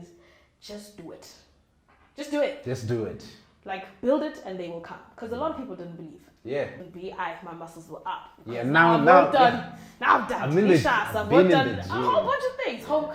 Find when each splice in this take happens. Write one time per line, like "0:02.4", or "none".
0:06.8